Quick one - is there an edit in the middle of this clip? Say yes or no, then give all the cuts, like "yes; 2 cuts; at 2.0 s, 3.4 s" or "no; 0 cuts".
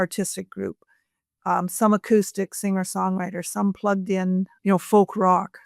yes; 1 cut; at 4.5 s